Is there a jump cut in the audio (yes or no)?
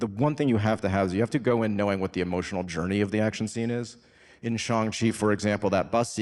no